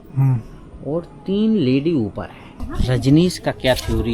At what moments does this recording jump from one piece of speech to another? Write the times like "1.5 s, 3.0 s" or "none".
2.5 s